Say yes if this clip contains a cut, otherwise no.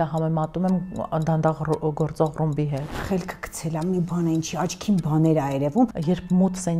yes